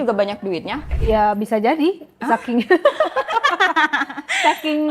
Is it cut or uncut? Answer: cut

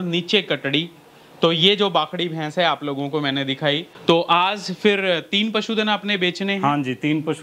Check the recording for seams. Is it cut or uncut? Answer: cut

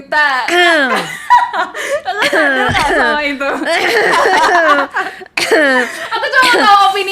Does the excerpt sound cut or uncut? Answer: uncut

